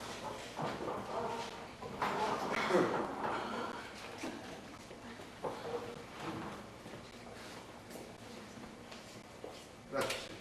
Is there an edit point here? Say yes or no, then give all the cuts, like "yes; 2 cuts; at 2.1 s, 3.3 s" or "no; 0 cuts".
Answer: no; 0 cuts